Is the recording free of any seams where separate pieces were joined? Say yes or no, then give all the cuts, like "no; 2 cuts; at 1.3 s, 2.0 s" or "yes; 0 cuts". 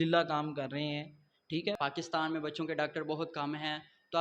no; 1 cut; at 1.8 s